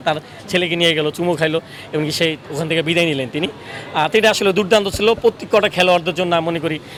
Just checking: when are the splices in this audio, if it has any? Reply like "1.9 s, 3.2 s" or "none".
none